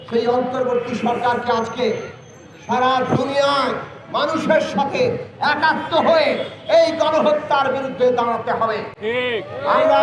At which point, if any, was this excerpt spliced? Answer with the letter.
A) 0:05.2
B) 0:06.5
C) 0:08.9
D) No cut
D